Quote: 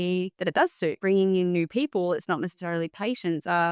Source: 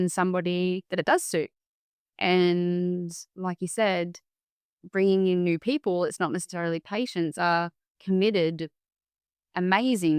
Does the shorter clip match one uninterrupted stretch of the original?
no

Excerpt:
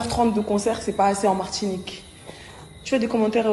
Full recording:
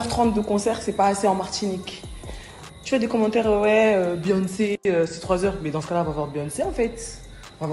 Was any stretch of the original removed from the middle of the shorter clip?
no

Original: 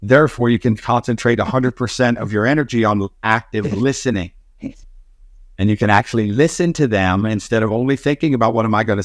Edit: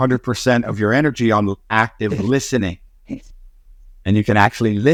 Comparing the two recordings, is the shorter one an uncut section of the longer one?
yes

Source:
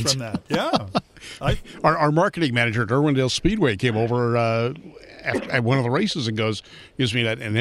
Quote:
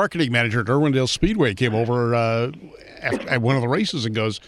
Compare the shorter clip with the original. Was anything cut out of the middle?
no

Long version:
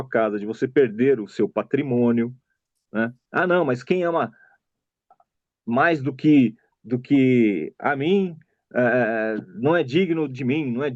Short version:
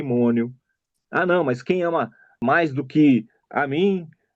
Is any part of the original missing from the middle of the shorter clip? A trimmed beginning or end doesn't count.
yes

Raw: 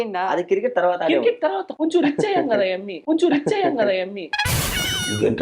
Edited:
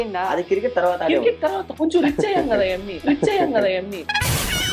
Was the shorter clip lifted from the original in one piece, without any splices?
no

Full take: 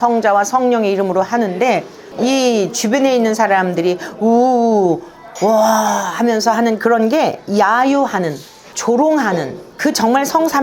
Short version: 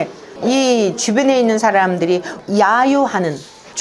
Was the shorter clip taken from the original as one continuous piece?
no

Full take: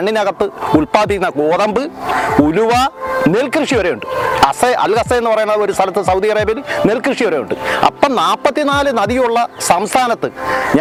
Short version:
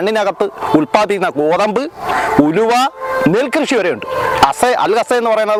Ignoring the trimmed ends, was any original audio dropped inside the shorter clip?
no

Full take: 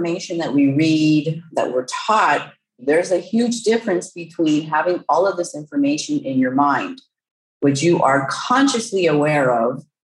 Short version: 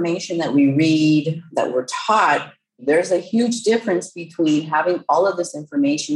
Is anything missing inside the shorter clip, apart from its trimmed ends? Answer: no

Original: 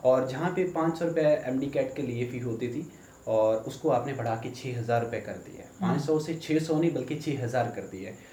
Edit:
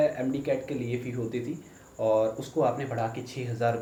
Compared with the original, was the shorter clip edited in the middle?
no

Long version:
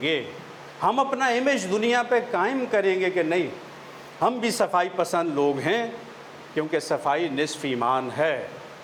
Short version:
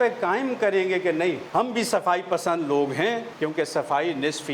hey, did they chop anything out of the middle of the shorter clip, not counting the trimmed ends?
yes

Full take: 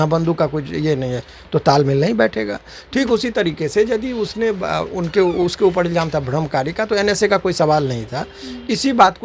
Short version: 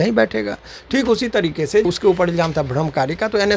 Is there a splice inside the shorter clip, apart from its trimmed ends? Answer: yes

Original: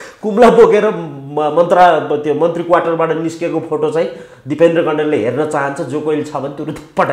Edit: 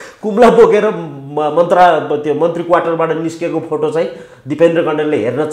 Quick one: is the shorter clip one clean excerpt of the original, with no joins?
yes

